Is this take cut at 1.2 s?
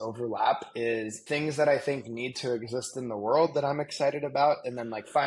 yes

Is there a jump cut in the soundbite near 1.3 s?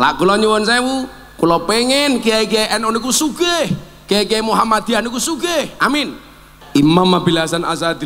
no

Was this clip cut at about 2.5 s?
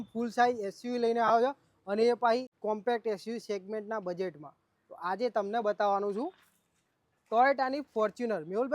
yes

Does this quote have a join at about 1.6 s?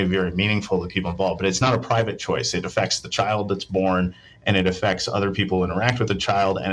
yes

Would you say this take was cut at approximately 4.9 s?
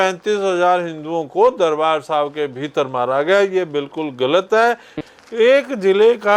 yes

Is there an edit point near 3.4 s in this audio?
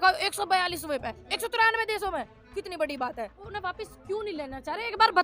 yes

